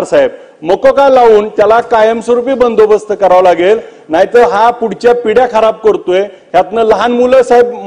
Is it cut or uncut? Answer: uncut